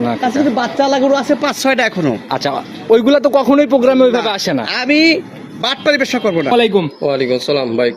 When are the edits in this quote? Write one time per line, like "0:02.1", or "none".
0:06.5